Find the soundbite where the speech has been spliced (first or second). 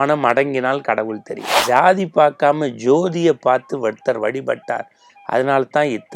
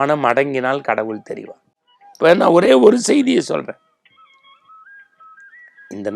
first